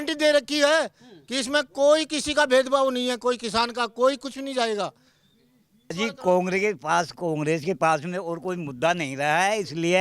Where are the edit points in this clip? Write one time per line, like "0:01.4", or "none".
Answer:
0:05.9